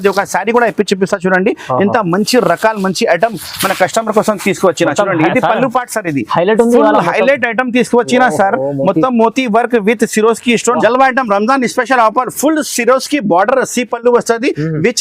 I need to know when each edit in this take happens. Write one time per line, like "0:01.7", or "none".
0:10.8